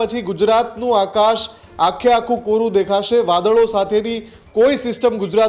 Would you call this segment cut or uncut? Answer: uncut